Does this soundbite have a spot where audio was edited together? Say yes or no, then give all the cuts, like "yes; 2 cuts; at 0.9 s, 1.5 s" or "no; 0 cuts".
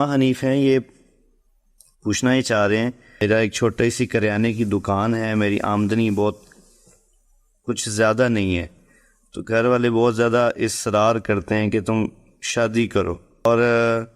yes; 2 cuts; at 3.1 s, 13.4 s